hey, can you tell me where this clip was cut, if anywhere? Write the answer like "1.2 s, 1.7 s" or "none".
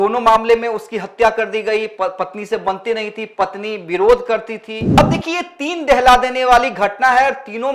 5.0 s